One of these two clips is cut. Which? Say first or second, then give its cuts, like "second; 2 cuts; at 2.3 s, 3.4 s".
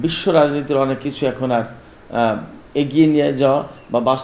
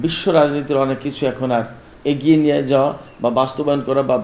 second; 1 cut; at 1.8 s